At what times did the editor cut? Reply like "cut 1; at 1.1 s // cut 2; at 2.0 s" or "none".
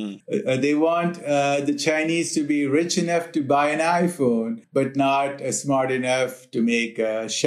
none

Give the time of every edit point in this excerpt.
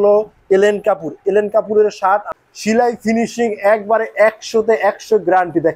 cut 1; at 2.3 s

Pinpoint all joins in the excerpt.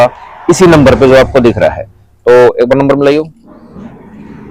cut 1; at 3.5 s

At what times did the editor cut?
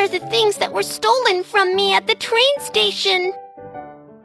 cut 1; at 3.3 s

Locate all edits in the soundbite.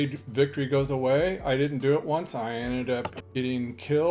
cut 1; at 3.2 s

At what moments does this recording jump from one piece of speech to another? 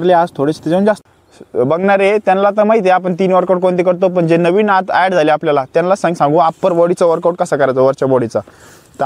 cut 1; at 1.0 s

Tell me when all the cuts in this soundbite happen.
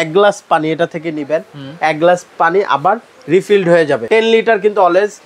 cut 1; at 4.0 s

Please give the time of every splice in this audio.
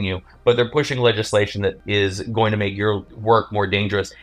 cut 1; at 1.8 s // cut 2; at 3.1 s

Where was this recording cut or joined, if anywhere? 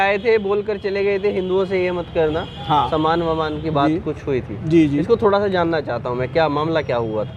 none

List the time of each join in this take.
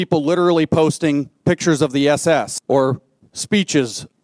cut 1; at 2.6 s

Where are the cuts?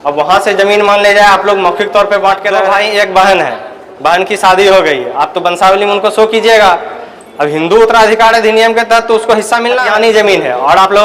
cut 1; at 2.6 s // cut 2; at 9.8 s

